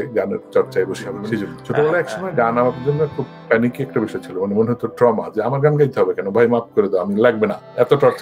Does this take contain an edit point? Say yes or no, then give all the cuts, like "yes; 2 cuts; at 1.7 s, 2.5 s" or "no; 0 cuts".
yes; 1 cut; at 1.5 s